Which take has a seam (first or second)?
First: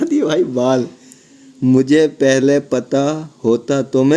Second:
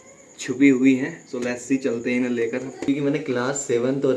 second